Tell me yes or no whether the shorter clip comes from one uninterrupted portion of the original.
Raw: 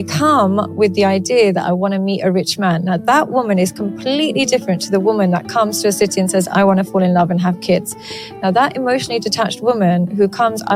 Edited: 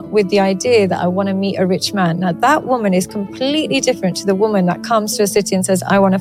yes